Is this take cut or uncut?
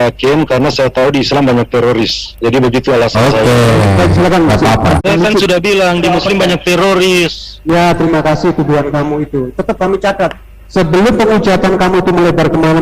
cut